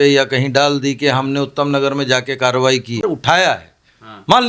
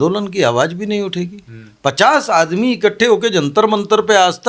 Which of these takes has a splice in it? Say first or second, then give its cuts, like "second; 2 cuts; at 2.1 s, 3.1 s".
first; 1 cut; at 3.0 s